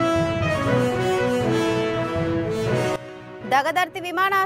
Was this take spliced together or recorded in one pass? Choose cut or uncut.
cut